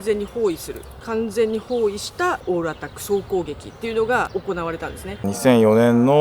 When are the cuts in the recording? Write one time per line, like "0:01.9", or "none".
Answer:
0:05.2